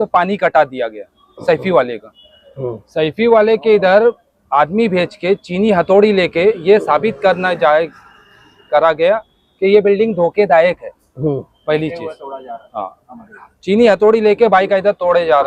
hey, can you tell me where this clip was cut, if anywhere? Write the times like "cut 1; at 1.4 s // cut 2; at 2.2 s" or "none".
none